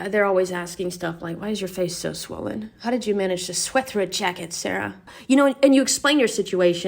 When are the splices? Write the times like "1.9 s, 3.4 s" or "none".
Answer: 5.1 s